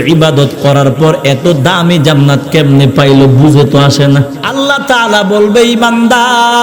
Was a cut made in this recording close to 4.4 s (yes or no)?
yes